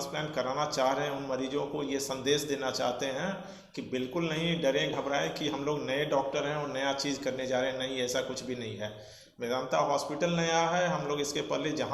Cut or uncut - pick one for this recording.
uncut